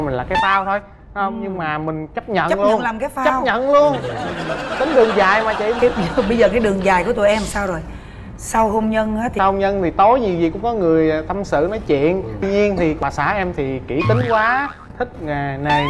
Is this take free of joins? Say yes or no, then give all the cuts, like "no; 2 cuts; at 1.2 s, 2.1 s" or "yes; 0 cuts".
yes; 0 cuts